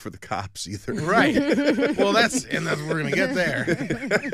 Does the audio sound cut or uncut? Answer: uncut